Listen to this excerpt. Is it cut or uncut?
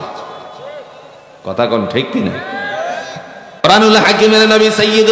cut